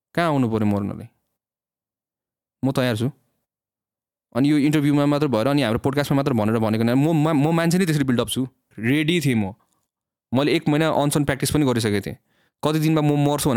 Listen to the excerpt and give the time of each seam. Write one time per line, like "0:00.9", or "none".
0:08.6